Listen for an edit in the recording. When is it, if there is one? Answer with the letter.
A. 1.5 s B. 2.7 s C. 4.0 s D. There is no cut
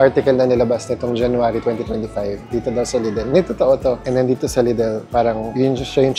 C